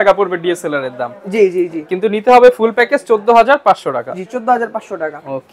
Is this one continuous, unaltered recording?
yes; 0 cuts

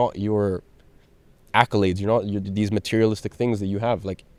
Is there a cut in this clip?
no; 0 cuts

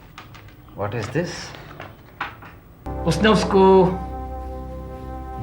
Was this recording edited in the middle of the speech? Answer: yes; 1 cut; at 2.9 s

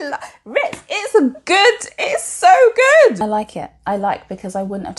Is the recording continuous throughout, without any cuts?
no; 1 cut; at 3.2 s

